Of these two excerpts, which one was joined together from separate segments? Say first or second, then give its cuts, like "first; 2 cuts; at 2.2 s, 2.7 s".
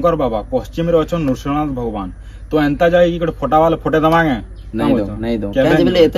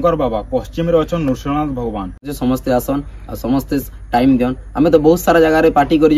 second; 1 cut; at 2.3 s